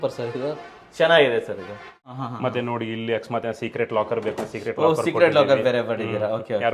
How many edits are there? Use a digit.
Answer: 1